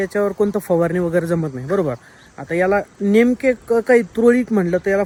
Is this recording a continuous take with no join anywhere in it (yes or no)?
yes